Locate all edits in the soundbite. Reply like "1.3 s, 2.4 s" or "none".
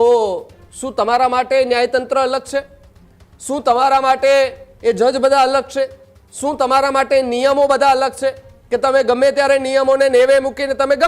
none